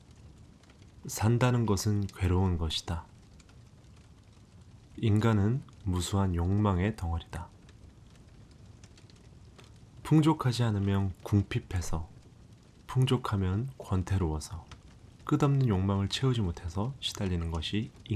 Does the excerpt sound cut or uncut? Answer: cut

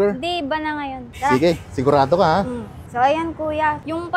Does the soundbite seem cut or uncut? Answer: uncut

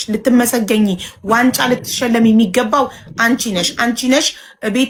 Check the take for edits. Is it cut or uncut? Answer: uncut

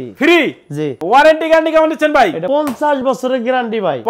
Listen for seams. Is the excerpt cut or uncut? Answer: cut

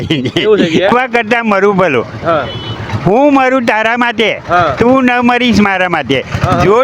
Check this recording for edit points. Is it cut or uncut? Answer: cut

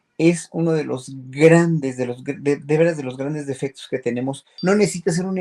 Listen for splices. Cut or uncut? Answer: cut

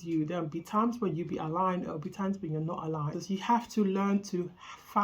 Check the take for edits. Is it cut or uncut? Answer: cut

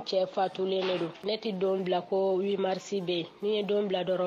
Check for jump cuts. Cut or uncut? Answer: cut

